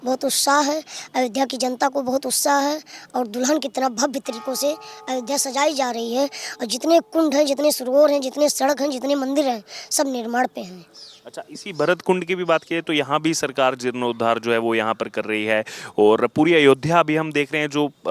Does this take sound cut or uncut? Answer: uncut